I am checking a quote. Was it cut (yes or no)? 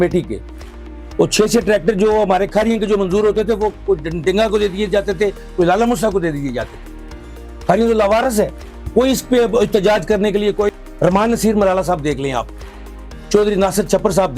yes